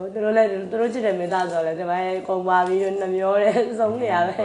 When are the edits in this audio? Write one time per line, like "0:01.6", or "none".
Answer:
none